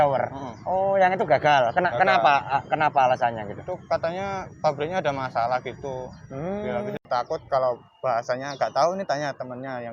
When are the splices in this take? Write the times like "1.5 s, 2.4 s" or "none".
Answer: 7.0 s